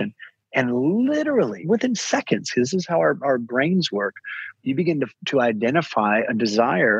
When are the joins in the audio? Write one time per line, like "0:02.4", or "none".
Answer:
0:01.6
0:04.4